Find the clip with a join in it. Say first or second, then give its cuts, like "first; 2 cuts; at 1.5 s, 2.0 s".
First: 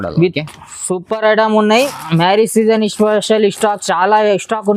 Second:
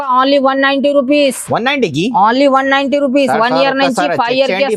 first; 1 cut; at 1.9 s